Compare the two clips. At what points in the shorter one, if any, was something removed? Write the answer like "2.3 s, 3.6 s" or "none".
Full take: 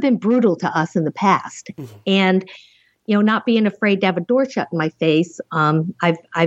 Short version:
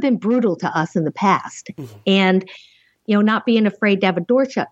none